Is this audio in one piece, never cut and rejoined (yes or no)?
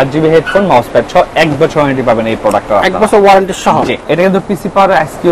no